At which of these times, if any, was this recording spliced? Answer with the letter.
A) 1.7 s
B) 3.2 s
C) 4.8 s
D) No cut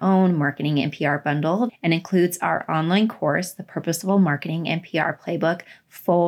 A